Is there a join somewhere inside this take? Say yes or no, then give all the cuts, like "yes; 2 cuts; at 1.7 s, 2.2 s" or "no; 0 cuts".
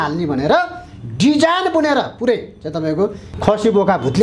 yes; 1 cut; at 3.3 s